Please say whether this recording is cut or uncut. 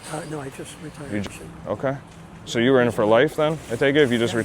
cut